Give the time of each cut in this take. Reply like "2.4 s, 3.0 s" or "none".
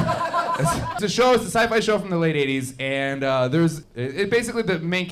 1.0 s, 3.8 s